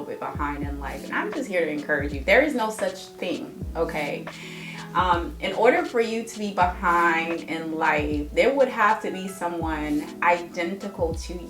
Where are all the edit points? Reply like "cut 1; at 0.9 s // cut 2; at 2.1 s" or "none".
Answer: none